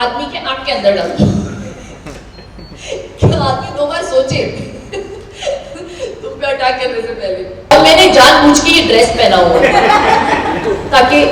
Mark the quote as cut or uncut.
cut